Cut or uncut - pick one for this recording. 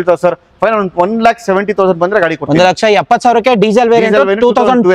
uncut